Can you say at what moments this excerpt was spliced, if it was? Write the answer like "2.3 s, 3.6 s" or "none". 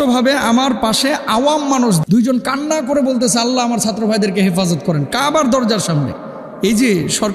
2.0 s